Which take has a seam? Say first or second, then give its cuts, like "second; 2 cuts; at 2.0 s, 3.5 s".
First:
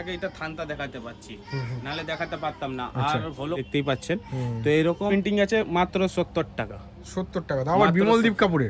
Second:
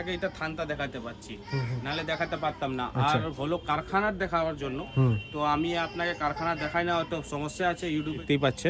first; 2 cuts; at 3.6 s, 5.1 s